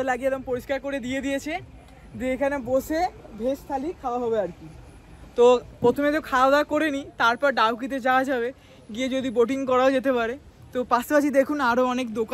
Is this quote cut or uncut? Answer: uncut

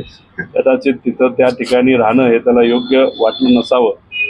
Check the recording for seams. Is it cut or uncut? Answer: uncut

